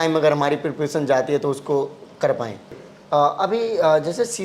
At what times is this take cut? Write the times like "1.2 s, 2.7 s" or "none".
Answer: 2.9 s